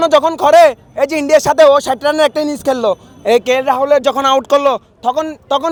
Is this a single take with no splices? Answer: yes; 0 cuts

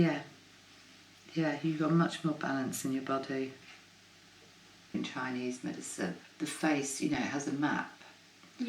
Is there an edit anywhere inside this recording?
yes; 2 cuts; at 4.9 s, 6.2 s

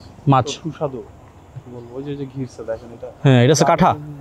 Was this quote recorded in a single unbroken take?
yes; 0 cuts

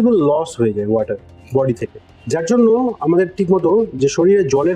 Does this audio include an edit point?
no; 0 cuts

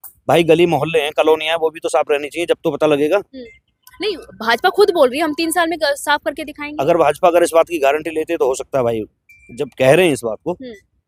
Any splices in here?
no; 0 cuts

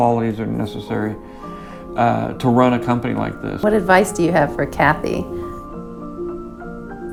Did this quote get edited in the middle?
no; 0 cuts

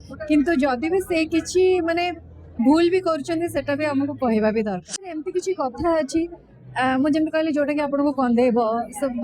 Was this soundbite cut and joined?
yes; 1 cut; at 5.2 s

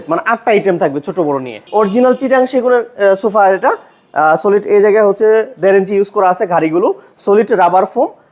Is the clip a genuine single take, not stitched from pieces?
no; 1 cut; at 1.6 s

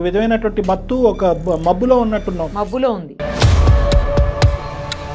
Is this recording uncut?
yes; 0 cuts

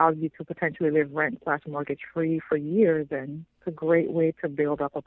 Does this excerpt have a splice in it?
no; 0 cuts

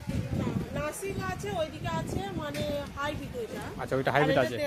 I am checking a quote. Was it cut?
no; 0 cuts

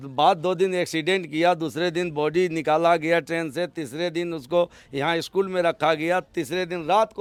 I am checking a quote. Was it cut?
no; 0 cuts

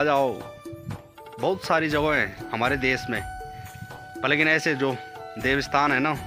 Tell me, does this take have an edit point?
no; 0 cuts

